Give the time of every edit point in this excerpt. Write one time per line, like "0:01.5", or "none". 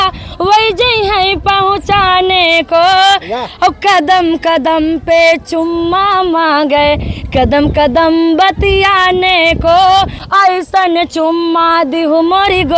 0:10.2